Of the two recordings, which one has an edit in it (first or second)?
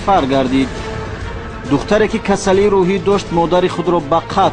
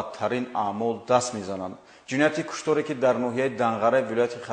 first